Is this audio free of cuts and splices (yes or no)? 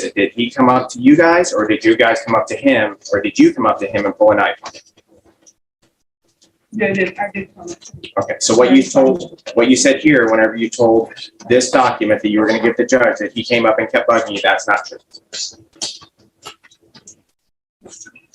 yes